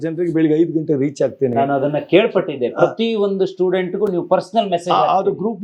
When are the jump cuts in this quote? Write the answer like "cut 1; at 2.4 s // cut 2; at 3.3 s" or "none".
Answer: none